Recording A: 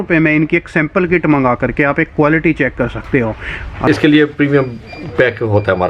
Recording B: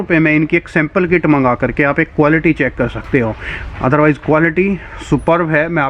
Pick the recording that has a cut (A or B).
A